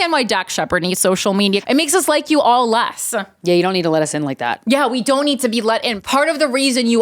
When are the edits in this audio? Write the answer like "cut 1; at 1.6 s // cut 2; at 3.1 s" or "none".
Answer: cut 1; at 1.6 s // cut 2; at 5.9 s

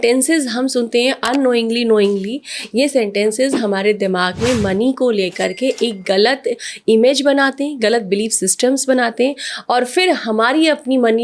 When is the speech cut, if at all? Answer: none

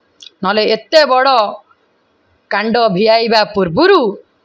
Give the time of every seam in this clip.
none

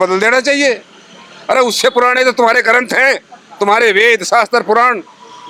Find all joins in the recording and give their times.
none

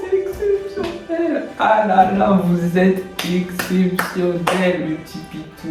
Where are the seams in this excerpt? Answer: none

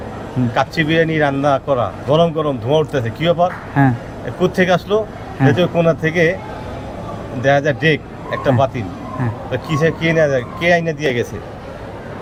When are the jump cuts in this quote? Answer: none

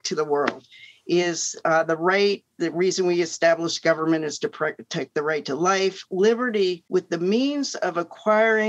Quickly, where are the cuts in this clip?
cut 1; at 6.8 s

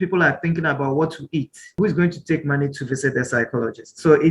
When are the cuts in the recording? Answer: cut 1; at 1.8 s

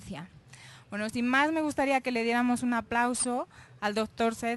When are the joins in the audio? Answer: cut 1; at 2.3 s

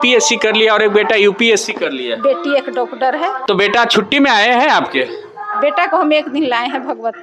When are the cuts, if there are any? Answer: cut 1; at 3.4 s

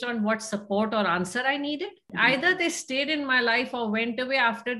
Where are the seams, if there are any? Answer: cut 1; at 2.1 s

